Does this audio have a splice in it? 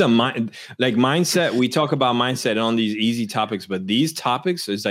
no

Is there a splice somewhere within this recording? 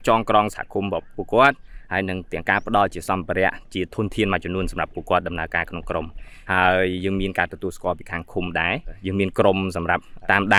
no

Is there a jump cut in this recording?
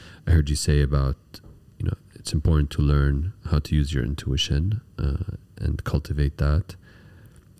no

